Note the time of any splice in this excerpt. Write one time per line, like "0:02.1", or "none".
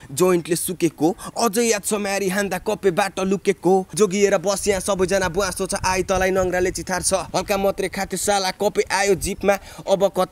0:03.9
0:07.3